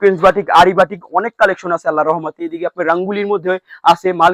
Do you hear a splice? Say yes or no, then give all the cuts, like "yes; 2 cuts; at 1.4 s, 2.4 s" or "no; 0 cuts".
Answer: no; 0 cuts